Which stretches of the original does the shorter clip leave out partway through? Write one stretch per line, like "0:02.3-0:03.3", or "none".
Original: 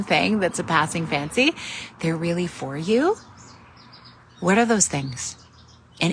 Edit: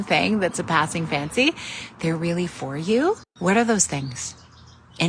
0:03.3-0:04.3